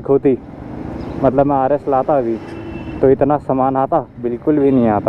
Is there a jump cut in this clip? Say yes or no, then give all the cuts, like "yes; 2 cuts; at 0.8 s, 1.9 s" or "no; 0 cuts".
no; 0 cuts